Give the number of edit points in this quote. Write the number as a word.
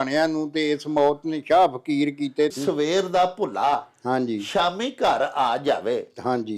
one